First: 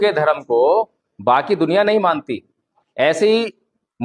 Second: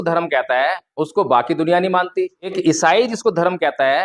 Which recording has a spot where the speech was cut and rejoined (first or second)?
second